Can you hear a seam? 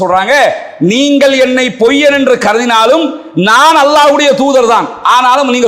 no; 0 cuts

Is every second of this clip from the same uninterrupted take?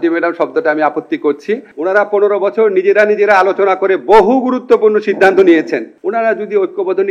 no; 2 cuts; at 1.7 s, 6.0 s

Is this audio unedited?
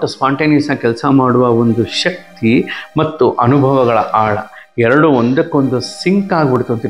yes; 0 cuts

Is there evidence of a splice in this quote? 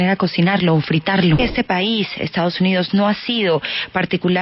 yes; 1 cut; at 1.4 s

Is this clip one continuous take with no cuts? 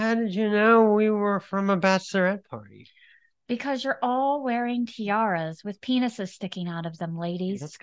yes; 0 cuts

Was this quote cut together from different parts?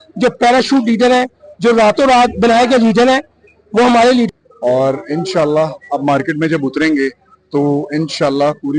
yes; 1 cut; at 4.3 s

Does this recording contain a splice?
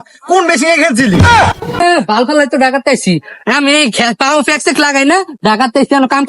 yes; 1 cut; at 1.6 s

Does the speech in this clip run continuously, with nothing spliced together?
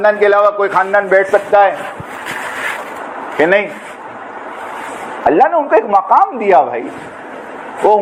yes; 0 cuts

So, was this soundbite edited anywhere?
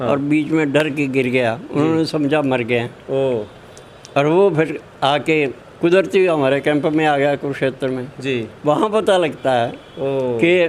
no; 0 cuts

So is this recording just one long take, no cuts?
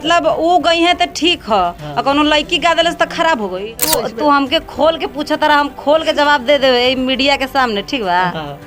no; 1 cut; at 3.9 s

